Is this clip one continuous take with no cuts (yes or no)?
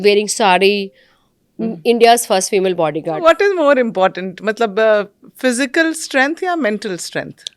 no